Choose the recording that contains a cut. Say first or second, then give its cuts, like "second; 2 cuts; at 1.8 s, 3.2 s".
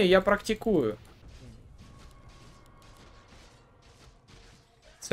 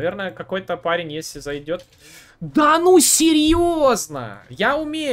first; 1 cut; at 1.2 s